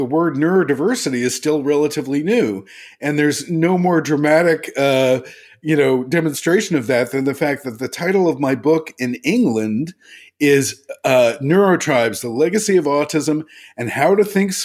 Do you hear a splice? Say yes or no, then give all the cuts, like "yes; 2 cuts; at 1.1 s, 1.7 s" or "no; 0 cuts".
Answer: no; 0 cuts